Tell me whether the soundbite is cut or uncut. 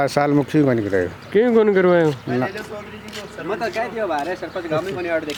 uncut